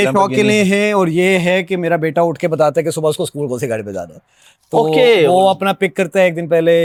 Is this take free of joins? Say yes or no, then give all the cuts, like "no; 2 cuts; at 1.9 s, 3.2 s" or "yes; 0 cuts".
yes; 0 cuts